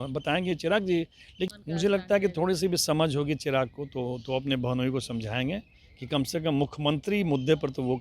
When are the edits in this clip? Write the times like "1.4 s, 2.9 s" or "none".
1.5 s